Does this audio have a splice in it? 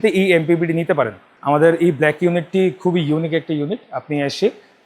yes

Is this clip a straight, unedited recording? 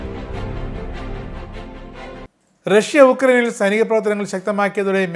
no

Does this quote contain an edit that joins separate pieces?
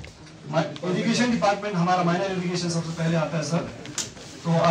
no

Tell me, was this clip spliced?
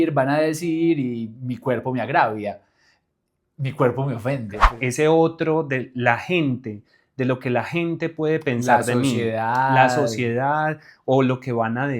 yes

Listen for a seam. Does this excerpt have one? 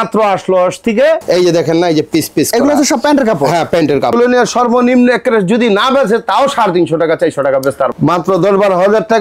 yes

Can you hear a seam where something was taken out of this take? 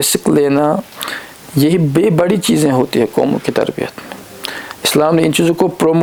no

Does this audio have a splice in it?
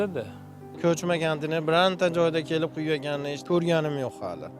yes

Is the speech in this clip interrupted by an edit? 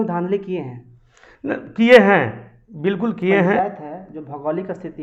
yes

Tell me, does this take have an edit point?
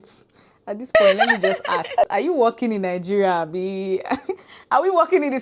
no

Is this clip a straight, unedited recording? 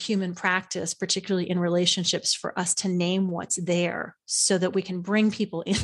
yes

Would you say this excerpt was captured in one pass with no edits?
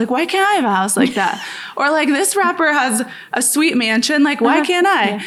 yes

